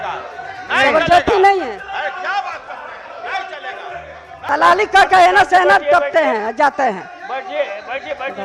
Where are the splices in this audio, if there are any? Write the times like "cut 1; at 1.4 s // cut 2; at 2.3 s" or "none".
cut 1; at 4.5 s